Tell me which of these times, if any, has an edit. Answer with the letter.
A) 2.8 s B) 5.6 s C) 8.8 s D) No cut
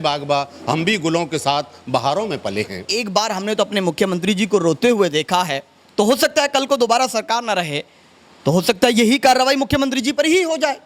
A